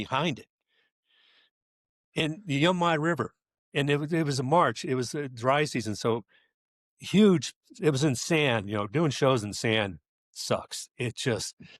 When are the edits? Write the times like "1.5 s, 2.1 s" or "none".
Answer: none

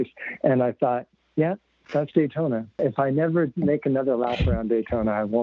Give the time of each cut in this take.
1.2 s, 2.8 s

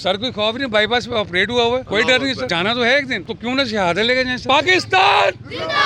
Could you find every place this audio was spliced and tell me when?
2.0 s, 3.2 s, 4.4 s

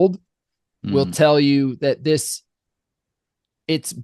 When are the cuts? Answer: none

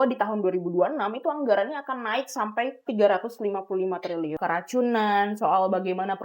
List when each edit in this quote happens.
2.9 s, 4.4 s

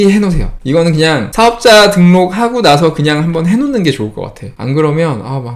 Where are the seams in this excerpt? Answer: none

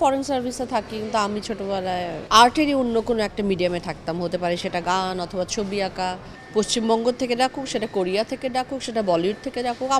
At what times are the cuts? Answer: 2.2 s, 6.3 s

